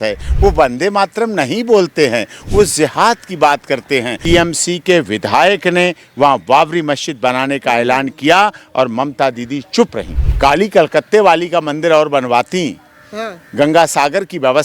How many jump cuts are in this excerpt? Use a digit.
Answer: 2